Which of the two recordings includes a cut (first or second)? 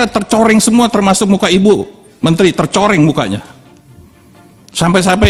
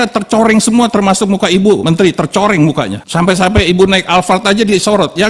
second